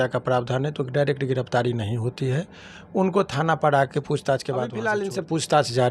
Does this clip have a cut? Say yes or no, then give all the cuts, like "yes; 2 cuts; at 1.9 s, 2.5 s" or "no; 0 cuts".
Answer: yes; 1 cut; at 4.8 s